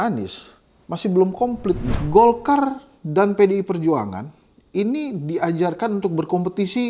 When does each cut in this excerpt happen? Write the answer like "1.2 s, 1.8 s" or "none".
1.9 s